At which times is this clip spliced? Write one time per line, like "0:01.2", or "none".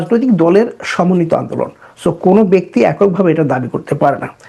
none